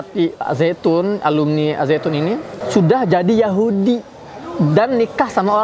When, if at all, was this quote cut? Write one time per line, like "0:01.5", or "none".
0:02.5